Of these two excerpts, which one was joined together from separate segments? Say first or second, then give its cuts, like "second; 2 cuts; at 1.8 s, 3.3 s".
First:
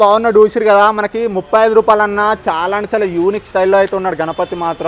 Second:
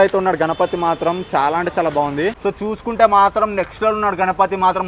second; 1 cut; at 2.4 s